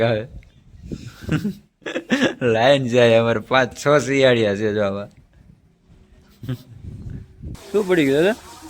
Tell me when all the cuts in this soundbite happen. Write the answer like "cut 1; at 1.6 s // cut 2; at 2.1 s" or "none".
cut 1; at 7.6 s